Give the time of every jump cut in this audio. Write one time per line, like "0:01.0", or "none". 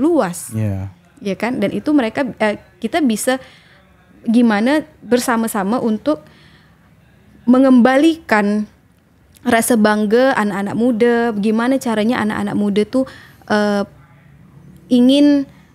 none